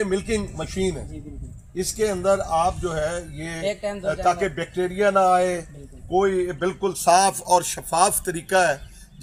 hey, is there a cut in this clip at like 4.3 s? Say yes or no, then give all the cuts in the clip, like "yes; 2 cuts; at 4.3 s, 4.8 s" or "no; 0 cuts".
no; 0 cuts